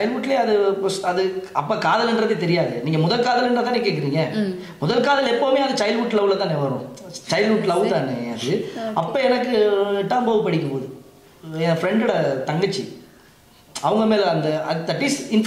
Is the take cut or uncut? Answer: uncut